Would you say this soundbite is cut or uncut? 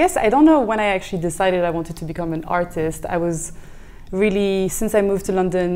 uncut